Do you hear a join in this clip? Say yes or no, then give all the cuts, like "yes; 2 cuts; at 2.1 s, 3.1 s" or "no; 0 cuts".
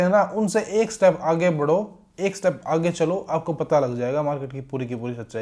no; 0 cuts